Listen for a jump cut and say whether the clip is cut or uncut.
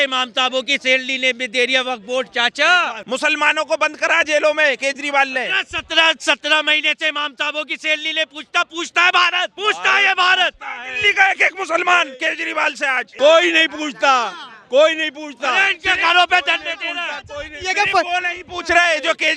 cut